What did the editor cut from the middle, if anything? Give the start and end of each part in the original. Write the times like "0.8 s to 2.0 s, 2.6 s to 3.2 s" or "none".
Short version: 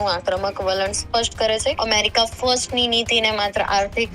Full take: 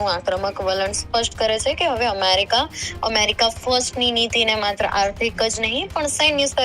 1.8 s to 3.0 s

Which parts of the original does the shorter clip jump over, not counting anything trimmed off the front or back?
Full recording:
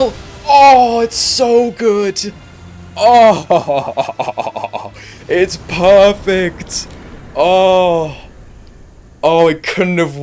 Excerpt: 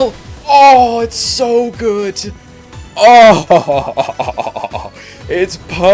none

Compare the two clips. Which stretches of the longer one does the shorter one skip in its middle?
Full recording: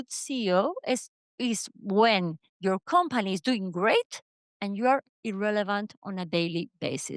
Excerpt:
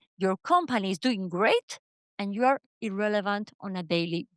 none

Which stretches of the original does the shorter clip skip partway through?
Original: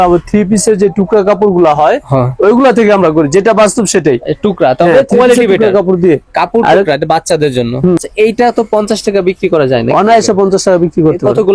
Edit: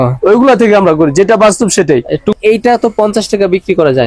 4.5 s to 8.1 s

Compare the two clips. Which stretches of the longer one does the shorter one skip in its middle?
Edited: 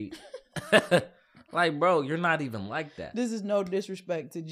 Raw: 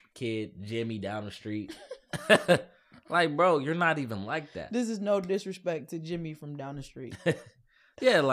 none

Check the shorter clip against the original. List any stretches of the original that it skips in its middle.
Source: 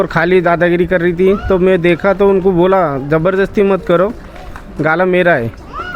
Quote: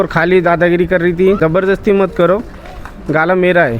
1.4 s to 3.1 s

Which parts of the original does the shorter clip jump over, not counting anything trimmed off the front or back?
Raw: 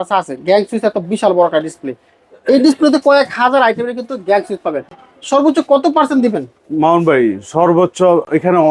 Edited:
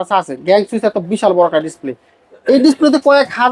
none

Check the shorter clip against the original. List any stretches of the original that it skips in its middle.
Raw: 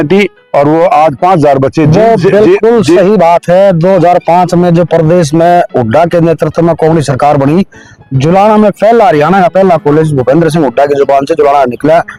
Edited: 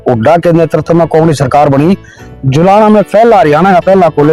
none

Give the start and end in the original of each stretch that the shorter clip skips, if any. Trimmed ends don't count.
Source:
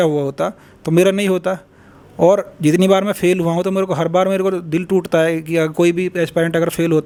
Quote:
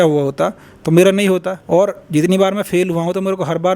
1.5 s to 2.0 s

